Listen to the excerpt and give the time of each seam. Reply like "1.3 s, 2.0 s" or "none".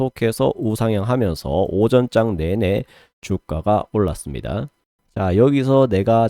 5.0 s